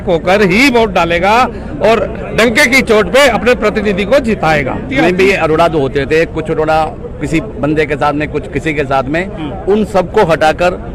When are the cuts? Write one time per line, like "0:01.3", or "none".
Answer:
0:04.9